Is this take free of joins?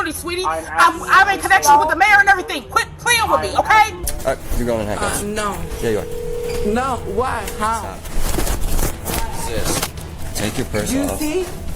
no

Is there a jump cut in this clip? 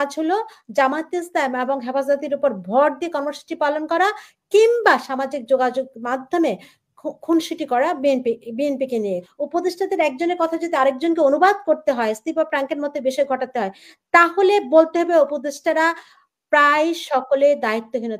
yes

